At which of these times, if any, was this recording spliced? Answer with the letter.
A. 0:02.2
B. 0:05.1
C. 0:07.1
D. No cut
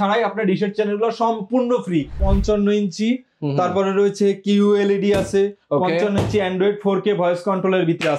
A